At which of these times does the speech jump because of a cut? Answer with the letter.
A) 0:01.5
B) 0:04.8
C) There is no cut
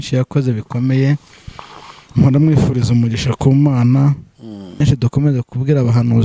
B